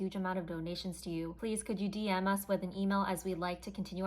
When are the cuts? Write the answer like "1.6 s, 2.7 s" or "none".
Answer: 1.3 s